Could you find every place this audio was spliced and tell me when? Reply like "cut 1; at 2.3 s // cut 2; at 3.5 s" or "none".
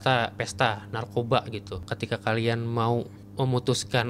cut 1; at 1.9 s // cut 2; at 3.2 s